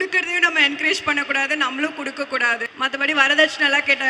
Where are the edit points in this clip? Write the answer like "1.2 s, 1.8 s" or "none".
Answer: 2.7 s